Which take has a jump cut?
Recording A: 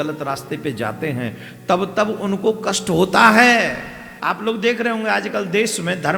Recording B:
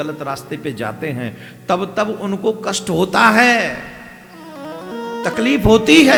A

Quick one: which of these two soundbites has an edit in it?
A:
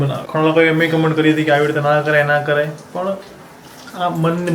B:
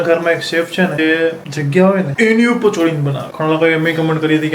B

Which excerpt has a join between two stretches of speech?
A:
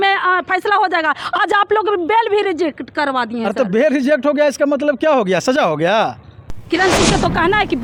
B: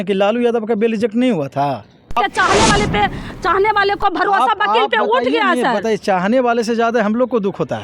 B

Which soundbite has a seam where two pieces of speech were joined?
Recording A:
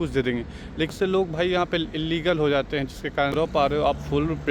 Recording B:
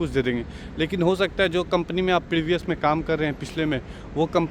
A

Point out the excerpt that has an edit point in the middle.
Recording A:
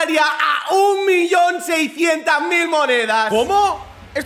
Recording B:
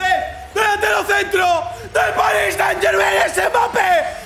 A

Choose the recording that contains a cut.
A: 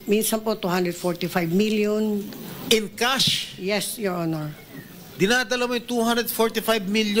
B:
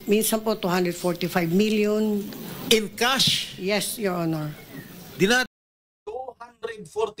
A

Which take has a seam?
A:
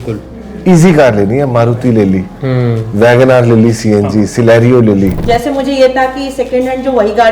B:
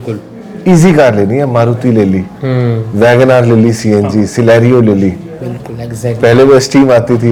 A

